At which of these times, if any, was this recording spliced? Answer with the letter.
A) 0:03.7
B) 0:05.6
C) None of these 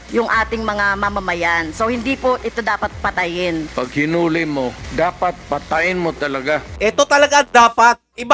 A